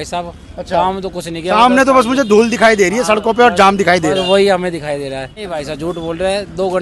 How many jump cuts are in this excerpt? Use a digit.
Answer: 1